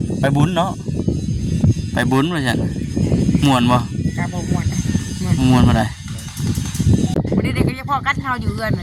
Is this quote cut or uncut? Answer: cut